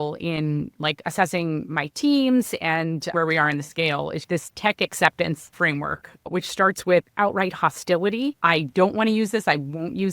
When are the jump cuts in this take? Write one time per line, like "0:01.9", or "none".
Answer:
0:03.1
0:04.2
0:05.5
0:08.4

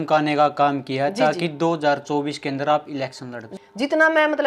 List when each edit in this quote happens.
0:03.4

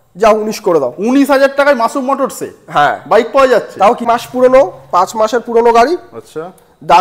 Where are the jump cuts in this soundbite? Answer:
0:04.0

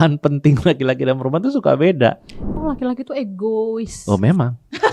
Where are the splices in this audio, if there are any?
0:02.5

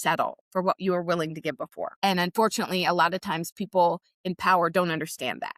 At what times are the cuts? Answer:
0:01.8

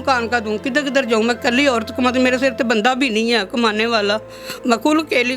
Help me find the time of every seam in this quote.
none

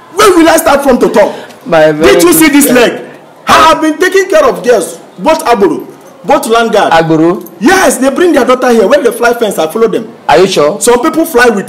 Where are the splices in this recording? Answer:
none

